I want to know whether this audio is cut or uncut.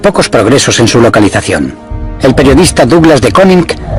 cut